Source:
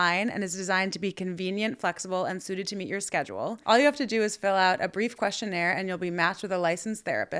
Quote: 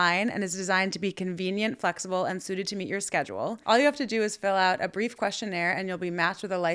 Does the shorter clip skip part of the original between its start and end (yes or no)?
no